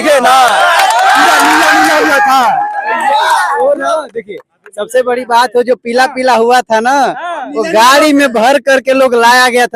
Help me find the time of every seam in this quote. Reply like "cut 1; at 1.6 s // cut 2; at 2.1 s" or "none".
none

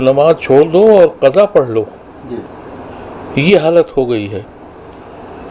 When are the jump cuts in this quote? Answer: none

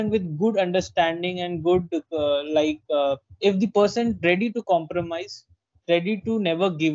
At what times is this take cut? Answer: none

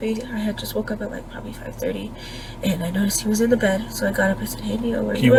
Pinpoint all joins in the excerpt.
none

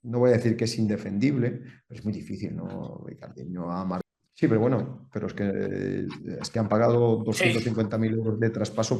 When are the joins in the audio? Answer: cut 1; at 4.1 s

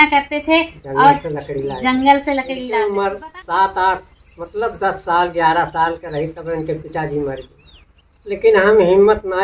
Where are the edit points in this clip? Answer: cut 1; at 2.6 s

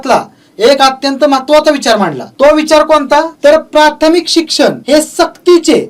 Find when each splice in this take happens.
cut 1; at 2.2 s // cut 2; at 3.3 s // cut 3; at 4.8 s

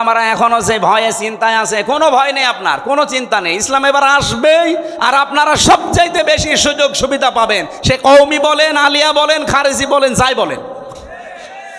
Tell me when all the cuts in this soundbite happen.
none

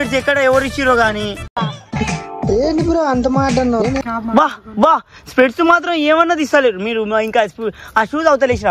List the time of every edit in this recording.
cut 1; at 4.0 s

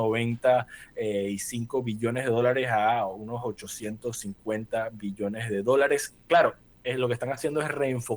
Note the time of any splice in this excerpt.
none

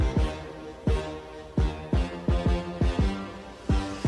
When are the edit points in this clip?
none

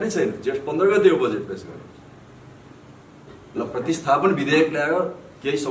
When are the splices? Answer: none

